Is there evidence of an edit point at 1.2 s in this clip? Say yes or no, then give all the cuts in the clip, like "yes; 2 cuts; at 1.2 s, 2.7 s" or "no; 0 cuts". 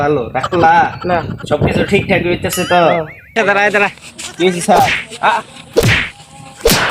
no; 1 cut; at 3.3 s